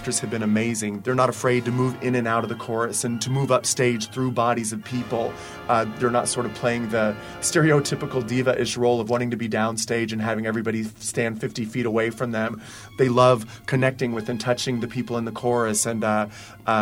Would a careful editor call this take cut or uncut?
cut